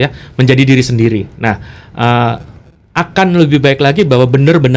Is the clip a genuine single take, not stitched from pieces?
yes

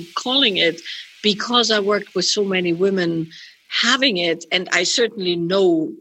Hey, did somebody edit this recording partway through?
no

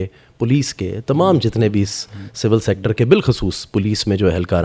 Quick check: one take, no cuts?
yes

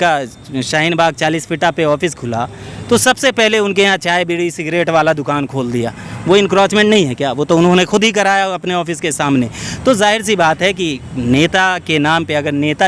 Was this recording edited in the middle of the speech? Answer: no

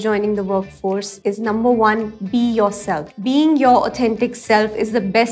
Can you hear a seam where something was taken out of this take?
yes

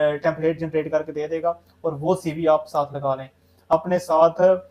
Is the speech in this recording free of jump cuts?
no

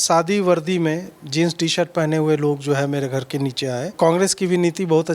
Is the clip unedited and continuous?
no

